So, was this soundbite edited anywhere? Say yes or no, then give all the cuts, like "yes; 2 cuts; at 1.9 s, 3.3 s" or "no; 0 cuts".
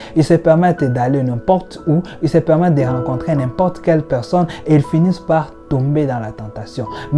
no; 0 cuts